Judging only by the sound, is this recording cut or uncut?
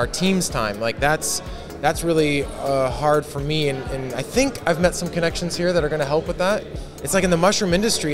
cut